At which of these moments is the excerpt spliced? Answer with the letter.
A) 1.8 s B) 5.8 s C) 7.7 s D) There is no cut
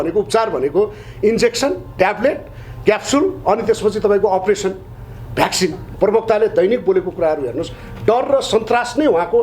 B